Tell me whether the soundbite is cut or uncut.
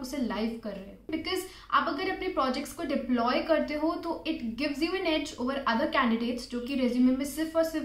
cut